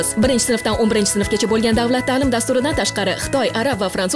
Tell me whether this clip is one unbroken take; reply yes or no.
yes